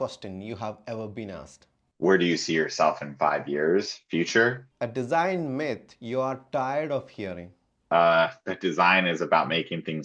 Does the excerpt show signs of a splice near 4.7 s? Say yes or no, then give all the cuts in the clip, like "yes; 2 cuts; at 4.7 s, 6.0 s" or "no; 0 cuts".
yes; 2 cuts; at 1.5 s, 4.7 s